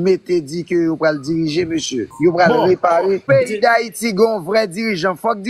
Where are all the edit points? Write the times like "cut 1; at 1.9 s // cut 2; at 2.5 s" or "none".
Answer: cut 1; at 2.1 s // cut 2; at 3.2 s